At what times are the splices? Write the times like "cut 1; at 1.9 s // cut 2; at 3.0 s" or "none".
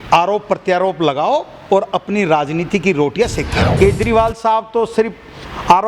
cut 1; at 3.7 s